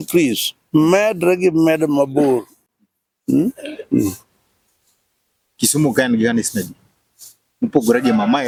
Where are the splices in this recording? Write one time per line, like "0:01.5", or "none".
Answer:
none